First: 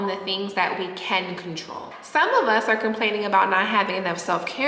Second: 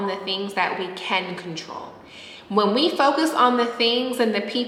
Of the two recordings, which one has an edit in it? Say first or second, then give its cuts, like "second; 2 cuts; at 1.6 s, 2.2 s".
first; 1 cut; at 2.1 s